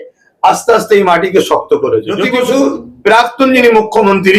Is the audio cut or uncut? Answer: cut